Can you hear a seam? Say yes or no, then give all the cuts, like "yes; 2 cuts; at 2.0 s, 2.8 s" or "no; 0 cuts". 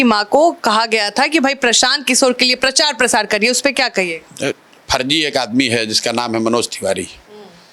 no; 0 cuts